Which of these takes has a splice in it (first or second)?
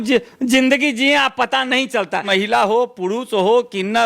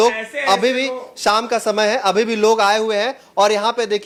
first